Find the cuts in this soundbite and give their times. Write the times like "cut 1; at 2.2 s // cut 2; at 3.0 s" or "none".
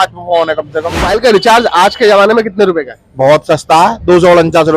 cut 1; at 1.1 s